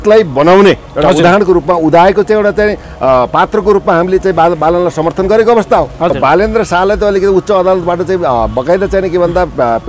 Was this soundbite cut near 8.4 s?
no; 1 cut; at 6.1 s

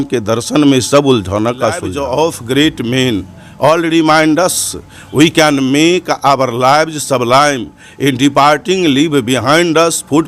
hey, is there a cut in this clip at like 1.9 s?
yes; 1 cut; at 1.9 s

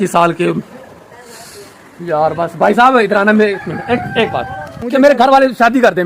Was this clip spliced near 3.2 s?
no; 1 cut; at 4.8 s

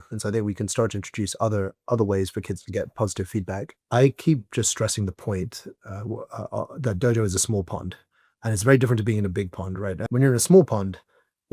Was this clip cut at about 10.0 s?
yes; 2 cuts; at 3.7 s, 10.0 s

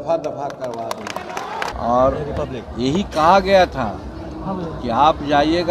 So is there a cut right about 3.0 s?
no; 1 cut; at 1.7 s

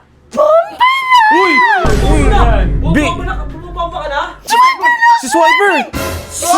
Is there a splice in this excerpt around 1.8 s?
no; 1 cut; at 4.4 s

